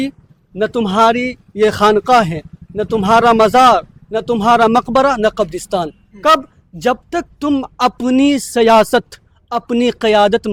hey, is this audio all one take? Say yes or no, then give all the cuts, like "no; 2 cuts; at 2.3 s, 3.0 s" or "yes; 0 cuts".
yes; 0 cuts